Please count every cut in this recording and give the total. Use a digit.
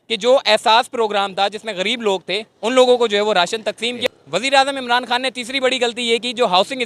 1